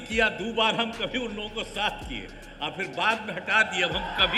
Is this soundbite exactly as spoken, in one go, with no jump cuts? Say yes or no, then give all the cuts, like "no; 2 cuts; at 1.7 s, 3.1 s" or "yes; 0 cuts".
yes; 0 cuts